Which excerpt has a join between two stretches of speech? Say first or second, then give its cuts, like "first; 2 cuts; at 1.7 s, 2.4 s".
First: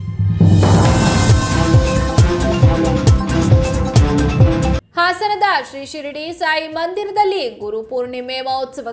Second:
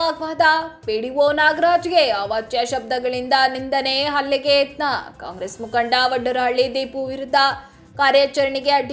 first; 1 cut; at 4.7 s